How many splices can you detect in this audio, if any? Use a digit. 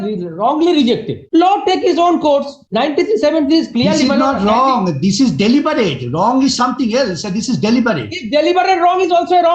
2